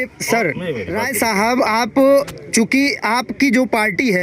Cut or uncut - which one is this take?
cut